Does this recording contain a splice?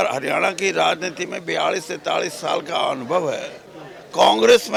no; 0 cuts

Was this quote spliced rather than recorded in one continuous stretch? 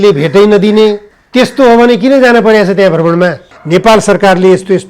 yes; 2 cuts; at 1.1 s, 3.5 s

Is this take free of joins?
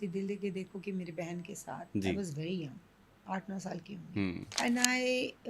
no; 1 cut; at 4.5 s

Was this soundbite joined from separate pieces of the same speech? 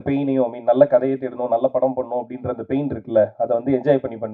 no; 0 cuts

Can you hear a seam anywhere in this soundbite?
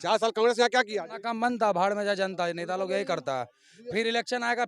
yes; 1 cut; at 1.2 s

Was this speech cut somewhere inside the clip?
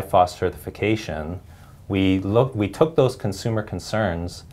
no; 0 cuts

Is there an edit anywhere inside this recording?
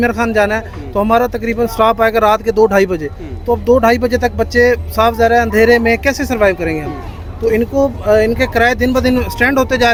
no; 0 cuts

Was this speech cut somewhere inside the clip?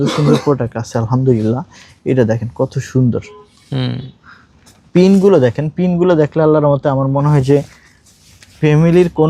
no; 0 cuts

